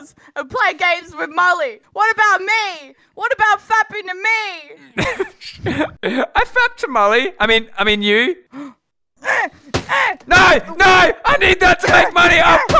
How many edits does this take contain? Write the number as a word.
three